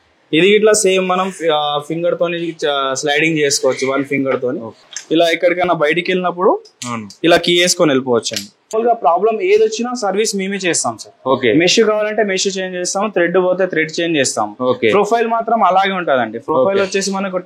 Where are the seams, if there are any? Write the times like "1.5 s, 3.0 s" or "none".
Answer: 4.8 s, 8.7 s

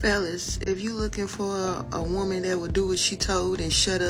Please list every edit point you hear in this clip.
none

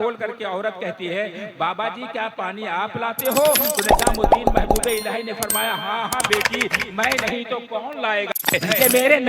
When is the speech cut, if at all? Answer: 8.3 s

